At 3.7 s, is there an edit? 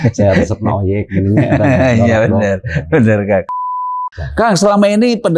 yes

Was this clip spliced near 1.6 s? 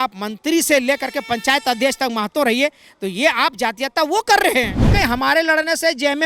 no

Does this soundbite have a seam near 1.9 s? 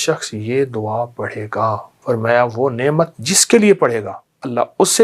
yes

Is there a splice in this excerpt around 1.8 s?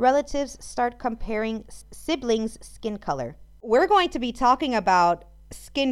yes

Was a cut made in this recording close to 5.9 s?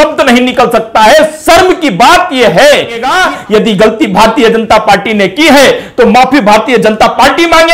no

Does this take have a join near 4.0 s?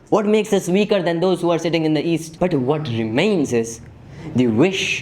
no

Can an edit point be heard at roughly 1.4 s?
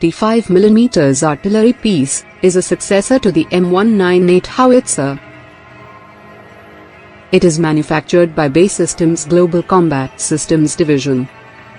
yes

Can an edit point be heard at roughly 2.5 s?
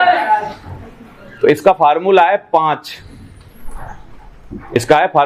no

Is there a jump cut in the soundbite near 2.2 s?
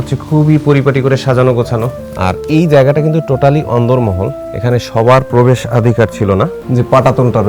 yes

